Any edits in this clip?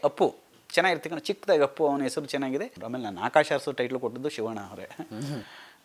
yes; 1 cut; at 2.8 s

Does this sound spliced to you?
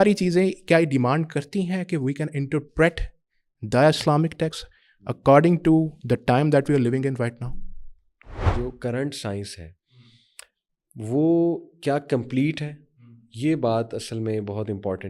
yes; 1 cut; at 8.5 s

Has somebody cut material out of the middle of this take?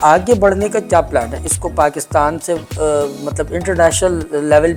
no; 0 cuts

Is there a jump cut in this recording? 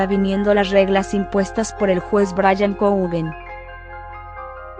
no; 0 cuts

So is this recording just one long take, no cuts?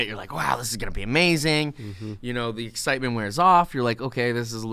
yes; 0 cuts

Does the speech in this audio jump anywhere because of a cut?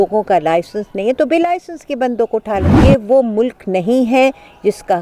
yes; 1 cut; at 2.7 s

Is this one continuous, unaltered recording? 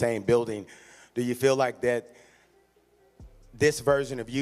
yes; 0 cuts

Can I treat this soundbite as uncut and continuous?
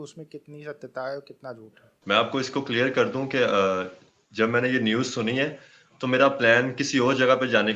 yes; 0 cuts

